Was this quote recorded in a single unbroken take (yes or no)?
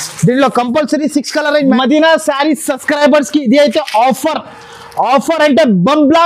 no